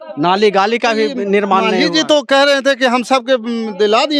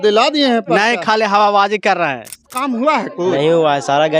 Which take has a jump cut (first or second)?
second